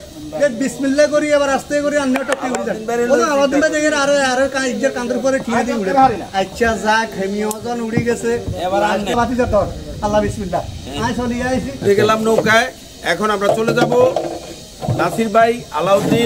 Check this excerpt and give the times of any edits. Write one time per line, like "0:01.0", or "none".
0:09.1
0:11.7